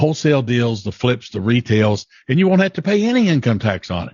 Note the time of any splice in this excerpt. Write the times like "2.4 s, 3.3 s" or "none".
none

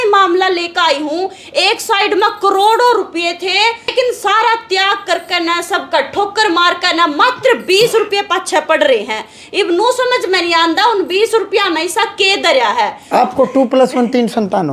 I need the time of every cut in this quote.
3.9 s, 13.1 s

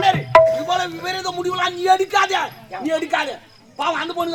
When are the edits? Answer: none

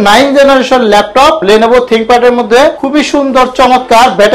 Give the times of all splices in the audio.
1.4 s, 2.8 s

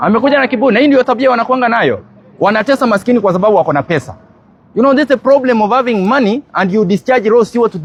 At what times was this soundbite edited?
none

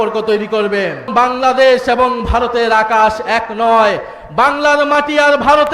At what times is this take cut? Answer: 1.1 s

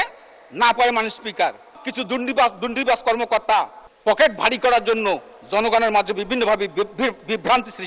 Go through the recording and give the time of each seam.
1.8 s, 3.8 s

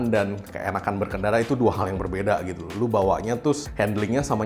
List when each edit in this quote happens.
none

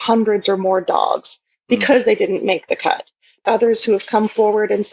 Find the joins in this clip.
3.4 s

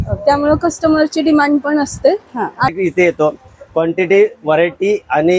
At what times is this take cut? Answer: 2.7 s

